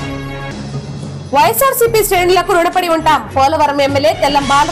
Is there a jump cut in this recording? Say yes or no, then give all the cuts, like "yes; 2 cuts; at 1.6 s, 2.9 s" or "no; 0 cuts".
no; 0 cuts